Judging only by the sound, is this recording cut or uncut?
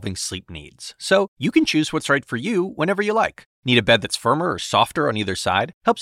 uncut